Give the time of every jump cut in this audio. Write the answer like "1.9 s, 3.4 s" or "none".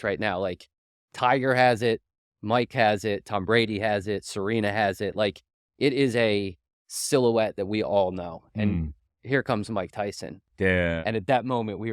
10.4 s